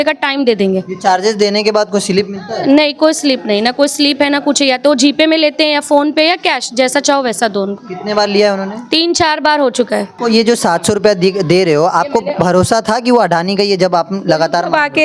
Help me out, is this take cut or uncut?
cut